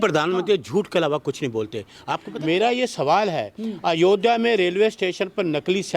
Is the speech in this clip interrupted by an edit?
yes; 1 cut; at 2.3 s

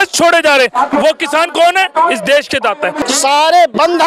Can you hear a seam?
yes; 1 cut; at 3.0 s

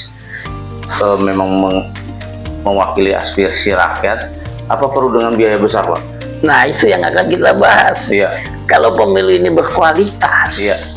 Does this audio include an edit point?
no; 0 cuts

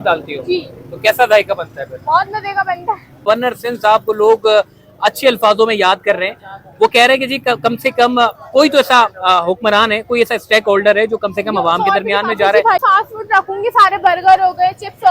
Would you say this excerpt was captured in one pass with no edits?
no; 2 cuts; at 3.3 s, 12.8 s

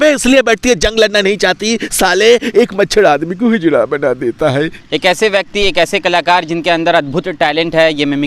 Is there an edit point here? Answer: yes; 1 cut; at 4.8 s

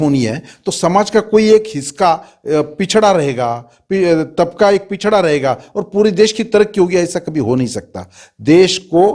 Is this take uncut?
yes; 0 cuts

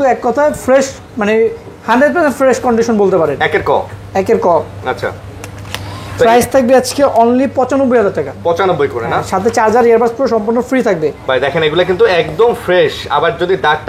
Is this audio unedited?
yes; 0 cuts

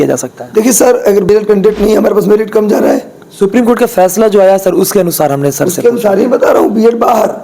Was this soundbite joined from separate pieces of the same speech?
yes; 1 cut; at 1.3 s

